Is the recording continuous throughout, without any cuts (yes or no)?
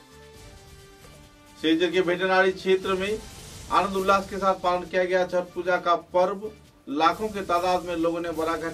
no